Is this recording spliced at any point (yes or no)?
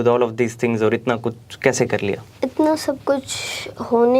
yes